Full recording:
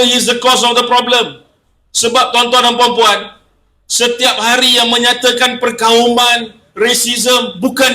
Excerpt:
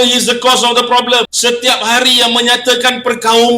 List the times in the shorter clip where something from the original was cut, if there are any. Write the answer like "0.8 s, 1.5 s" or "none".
1.3 s

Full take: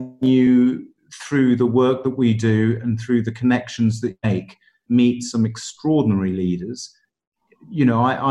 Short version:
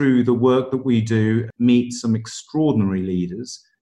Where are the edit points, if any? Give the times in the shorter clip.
1.5 s

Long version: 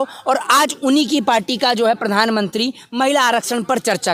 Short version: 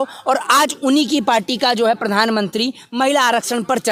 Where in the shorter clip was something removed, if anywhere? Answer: none

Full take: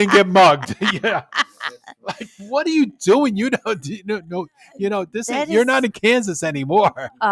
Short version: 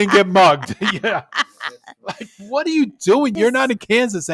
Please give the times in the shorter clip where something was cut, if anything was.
3.3 s

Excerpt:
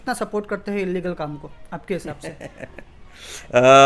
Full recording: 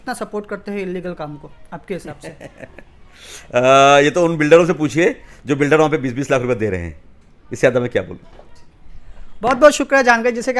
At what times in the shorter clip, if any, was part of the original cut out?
none

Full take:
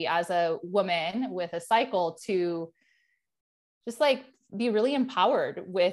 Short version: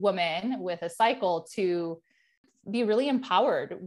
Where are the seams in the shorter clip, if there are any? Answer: 2.5 s

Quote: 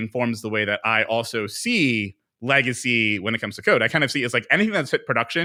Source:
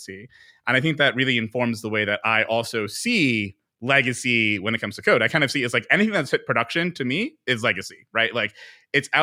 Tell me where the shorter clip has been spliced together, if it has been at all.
none

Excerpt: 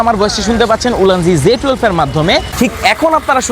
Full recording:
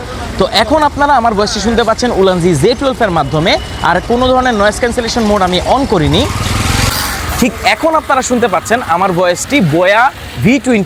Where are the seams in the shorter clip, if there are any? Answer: 2.5 s

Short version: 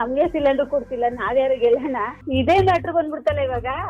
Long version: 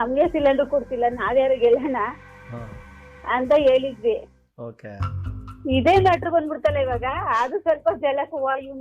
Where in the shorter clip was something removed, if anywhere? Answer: 2.2 s

